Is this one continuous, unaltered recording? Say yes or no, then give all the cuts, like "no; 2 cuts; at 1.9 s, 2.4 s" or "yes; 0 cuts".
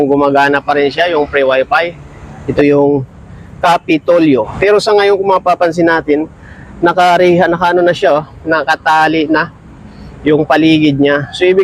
no; 2 cuts; at 2.4 s, 4.5 s